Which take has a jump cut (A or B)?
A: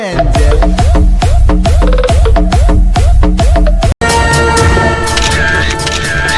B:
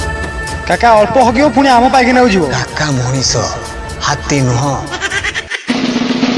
A